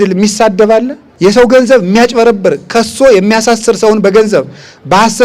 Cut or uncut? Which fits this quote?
cut